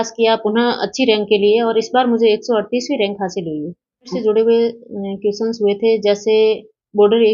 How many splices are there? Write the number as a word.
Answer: one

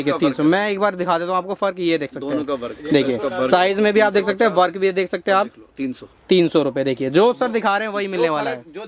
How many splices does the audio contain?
zero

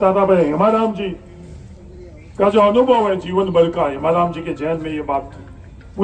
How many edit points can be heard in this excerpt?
zero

